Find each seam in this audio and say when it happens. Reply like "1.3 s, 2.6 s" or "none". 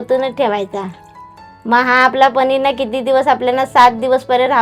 none